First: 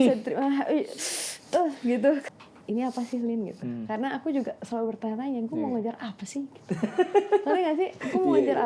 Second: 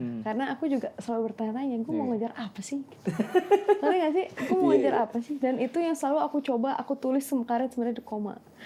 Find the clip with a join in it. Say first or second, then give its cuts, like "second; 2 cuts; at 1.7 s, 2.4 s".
first; 1 cut; at 2.3 s